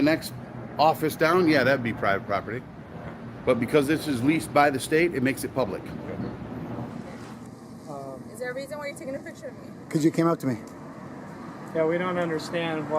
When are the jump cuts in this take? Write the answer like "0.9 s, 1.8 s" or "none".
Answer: 7.0 s